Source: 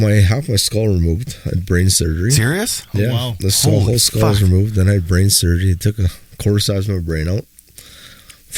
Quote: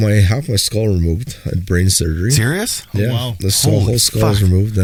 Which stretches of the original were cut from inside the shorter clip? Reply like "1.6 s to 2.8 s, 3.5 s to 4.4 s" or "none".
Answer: none

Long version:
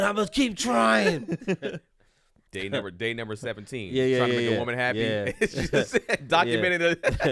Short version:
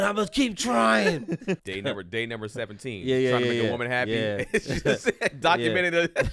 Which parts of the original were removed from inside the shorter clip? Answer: 1.6 s to 2.5 s

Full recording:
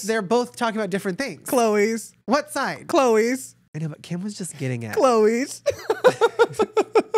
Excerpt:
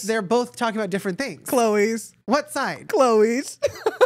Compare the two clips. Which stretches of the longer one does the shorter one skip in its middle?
2.8 s to 4.8 s

